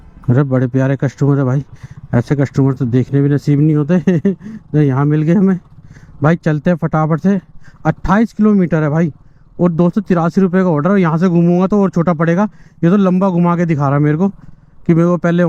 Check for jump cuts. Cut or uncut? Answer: uncut